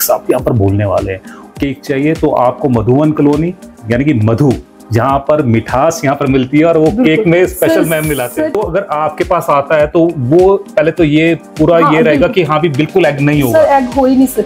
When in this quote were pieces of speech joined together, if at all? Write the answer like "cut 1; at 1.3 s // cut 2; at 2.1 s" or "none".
cut 1; at 1.3 s // cut 2; at 8.6 s